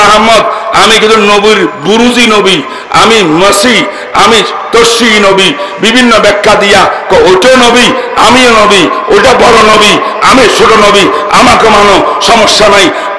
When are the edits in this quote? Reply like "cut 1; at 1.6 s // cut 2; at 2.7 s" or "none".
none